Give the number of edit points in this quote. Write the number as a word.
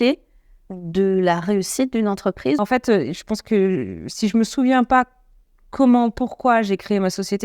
one